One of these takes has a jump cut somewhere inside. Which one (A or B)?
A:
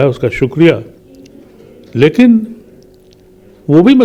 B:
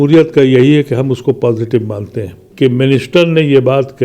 B